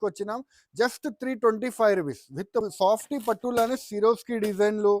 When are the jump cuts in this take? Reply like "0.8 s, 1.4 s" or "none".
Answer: 2.7 s